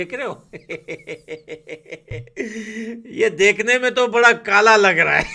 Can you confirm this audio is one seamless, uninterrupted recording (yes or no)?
yes